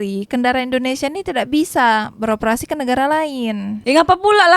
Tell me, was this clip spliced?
no; 0 cuts

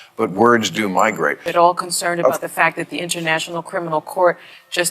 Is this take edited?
yes; 1 cut; at 1.5 s

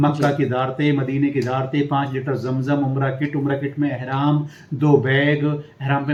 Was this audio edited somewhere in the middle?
no; 0 cuts

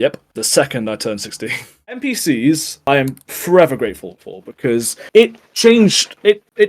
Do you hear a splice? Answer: yes; 1 cut; at 2.0 s

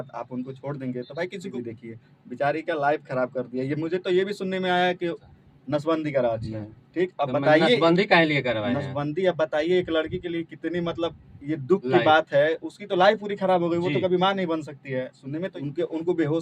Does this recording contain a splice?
yes; 3 cuts; at 1.5 s, 5.3 s, 15.5 s

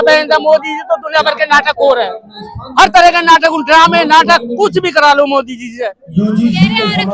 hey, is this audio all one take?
no; 1 cut; at 6.0 s

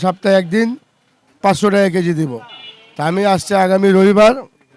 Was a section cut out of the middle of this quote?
no; 0 cuts

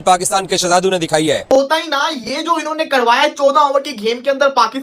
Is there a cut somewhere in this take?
yes; 1 cut; at 1.4 s

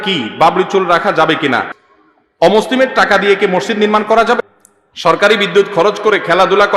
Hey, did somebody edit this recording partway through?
yes; 2 cuts; at 1.8 s, 4.4 s

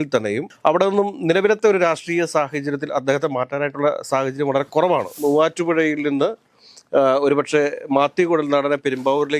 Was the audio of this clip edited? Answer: yes; 1 cut; at 5.1 s

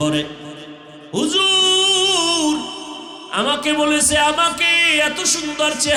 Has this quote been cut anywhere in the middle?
no; 0 cuts

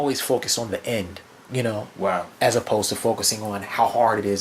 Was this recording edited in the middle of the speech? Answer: no; 0 cuts

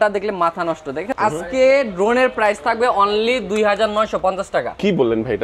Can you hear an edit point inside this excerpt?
yes; 1 cut; at 1.1 s

